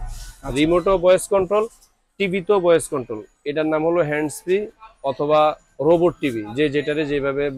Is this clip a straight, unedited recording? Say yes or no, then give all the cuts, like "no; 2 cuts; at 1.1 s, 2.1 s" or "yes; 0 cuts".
yes; 0 cuts